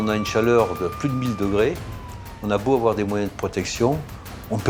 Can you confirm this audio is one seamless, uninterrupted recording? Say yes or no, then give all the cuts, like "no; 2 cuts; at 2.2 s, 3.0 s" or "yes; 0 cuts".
yes; 0 cuts